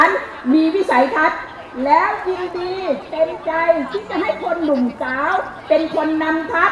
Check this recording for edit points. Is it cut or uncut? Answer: uncut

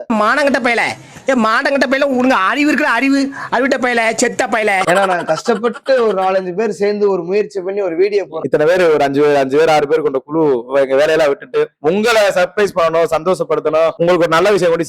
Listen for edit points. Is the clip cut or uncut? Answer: uncut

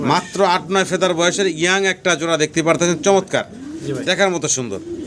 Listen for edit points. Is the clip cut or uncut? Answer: uncut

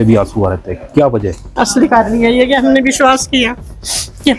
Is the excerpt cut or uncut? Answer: cut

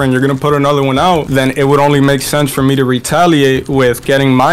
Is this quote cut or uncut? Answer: uncut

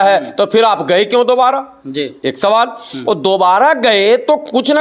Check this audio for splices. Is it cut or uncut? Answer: uncut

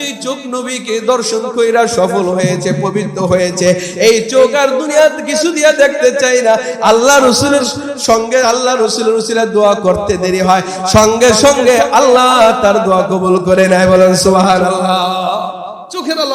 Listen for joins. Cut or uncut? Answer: uncut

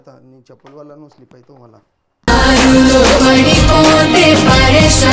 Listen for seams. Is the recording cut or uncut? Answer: uncut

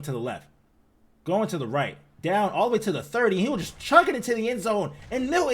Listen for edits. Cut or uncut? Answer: cut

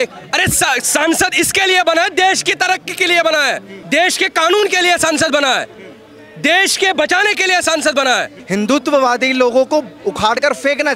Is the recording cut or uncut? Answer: cut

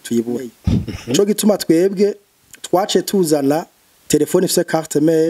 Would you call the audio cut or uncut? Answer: cut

